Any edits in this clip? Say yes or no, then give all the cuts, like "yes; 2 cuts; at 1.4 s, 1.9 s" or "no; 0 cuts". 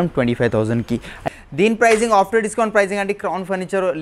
yes; 1 cut; at 1.2 s